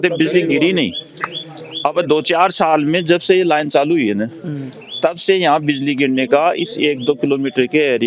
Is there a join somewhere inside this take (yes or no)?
no